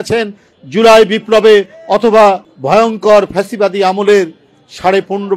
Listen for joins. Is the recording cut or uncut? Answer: cut